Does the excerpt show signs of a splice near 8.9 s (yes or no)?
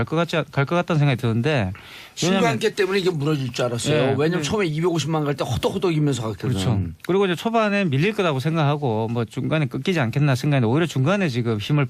no